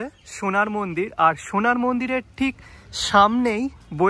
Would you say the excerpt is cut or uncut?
uncut